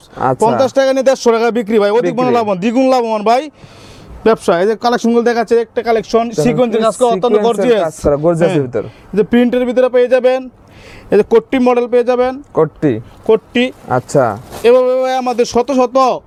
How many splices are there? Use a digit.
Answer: 0